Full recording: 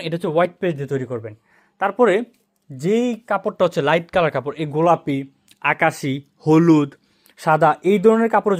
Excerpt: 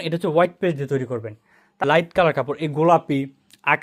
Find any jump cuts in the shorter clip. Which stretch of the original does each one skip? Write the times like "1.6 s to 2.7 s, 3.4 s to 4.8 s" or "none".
1.8 s to 3.8 s

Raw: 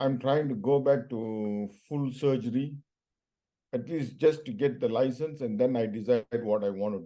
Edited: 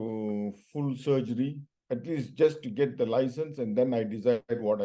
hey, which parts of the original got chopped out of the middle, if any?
2.8 s to 3.5 s

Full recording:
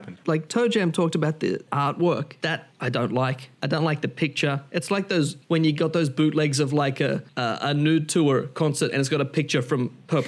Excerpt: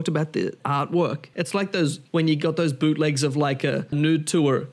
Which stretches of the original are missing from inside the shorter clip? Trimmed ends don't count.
2.3 s to 4.6 s, 7.3 s to 7.7 s

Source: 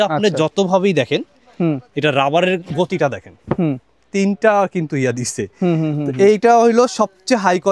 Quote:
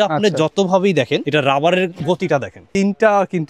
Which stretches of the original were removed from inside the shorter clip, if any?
1.2 s to 1.9 s, 3.3 s to 4.0 s

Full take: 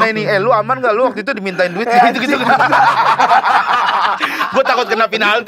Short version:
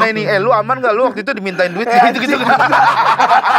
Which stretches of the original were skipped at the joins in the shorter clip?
none

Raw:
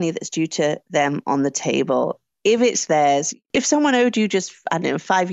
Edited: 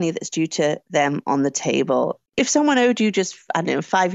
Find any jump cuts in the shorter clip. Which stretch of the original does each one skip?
2.2 s to 3.4 s

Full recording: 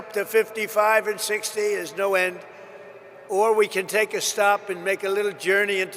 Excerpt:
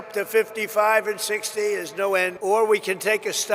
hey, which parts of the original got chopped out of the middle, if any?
2.3 s to 3.2 s

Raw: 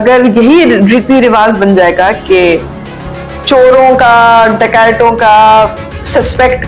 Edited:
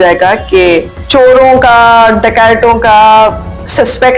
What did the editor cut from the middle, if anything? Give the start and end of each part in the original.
2.7 s to 3.3 s

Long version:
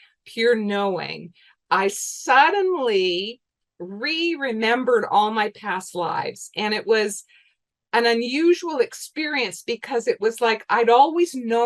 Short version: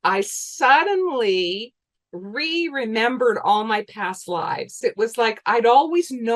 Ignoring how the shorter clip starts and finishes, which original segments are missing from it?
6.5 s to 10.0 s

